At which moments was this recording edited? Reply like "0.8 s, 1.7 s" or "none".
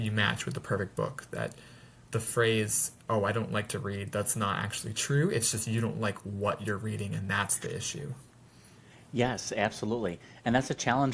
none